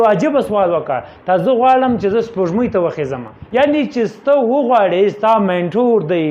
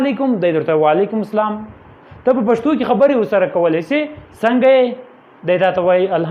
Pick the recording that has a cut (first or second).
first